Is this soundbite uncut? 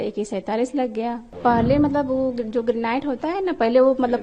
no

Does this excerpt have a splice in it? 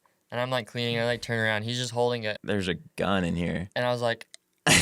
yes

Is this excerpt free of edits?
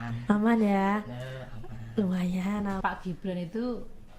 no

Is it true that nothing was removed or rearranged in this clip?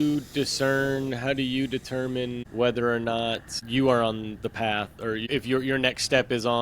no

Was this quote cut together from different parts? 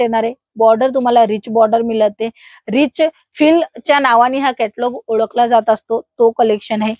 no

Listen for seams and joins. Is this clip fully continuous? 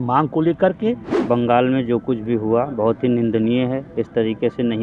no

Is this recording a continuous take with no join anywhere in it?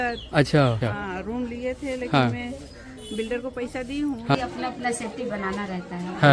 no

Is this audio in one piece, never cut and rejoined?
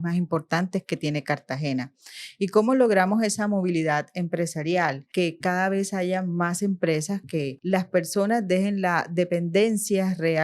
no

